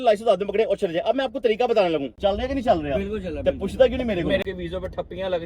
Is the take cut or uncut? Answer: cut